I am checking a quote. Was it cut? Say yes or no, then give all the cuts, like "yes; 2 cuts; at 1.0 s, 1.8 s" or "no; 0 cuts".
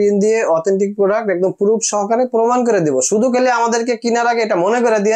no; 0 cuts